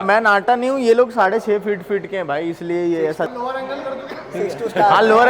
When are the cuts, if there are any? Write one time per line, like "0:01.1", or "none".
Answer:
0:03.2